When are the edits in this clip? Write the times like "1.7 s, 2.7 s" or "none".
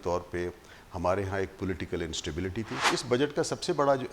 2.8 s

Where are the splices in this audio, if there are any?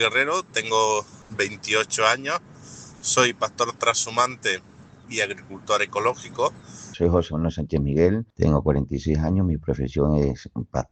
6.9 s

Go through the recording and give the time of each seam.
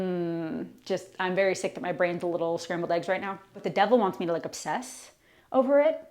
3.6 s

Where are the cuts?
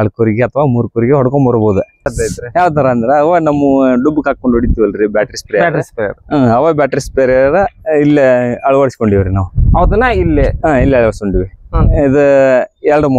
2.1 s

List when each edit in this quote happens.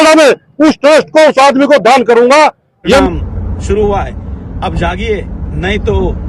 3.0 s

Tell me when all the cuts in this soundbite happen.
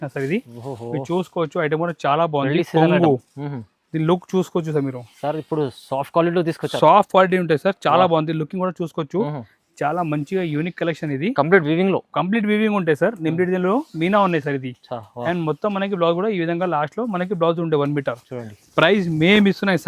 none

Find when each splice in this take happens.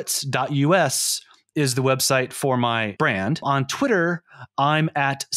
3.1 s

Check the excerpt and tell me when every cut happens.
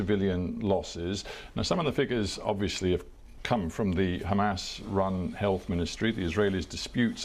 none

